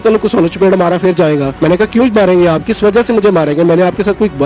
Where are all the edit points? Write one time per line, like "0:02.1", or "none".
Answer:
0:01.5